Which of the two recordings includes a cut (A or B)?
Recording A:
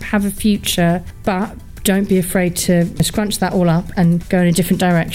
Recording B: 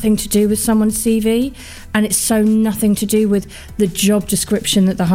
A